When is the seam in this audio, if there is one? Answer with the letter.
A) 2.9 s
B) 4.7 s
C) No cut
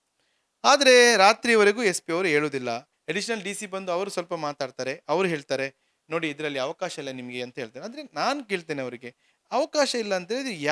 A